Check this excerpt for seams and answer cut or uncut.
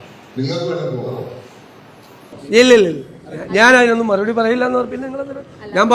cut